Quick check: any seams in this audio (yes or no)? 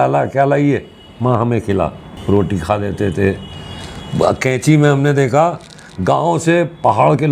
no